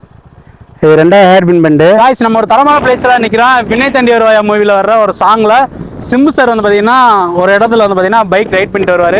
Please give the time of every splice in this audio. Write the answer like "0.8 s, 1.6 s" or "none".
2.0 s